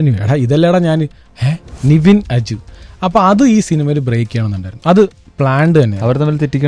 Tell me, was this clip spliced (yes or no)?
yes